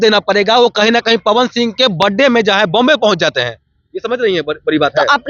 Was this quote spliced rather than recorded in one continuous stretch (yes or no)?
no